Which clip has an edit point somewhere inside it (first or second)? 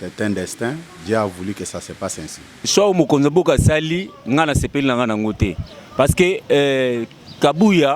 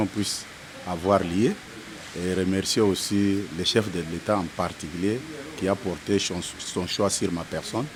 first